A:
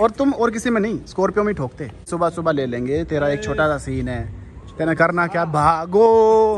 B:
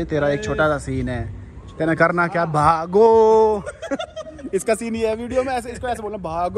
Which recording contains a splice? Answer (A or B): A